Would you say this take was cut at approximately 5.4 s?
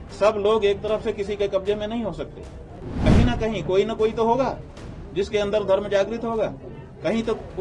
no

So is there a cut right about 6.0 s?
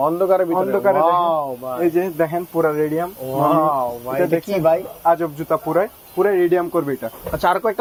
no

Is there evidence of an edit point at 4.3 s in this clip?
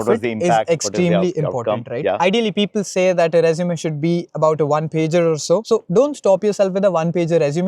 no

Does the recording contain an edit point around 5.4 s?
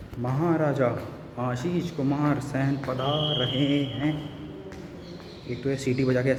no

